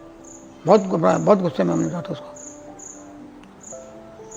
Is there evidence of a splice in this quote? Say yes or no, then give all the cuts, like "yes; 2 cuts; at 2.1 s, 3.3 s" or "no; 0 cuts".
no; 0 cuts